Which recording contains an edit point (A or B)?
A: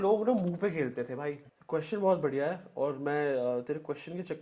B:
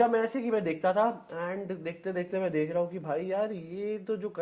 A